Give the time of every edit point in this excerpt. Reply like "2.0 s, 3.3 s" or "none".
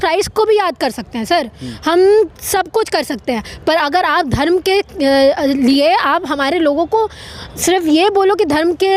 none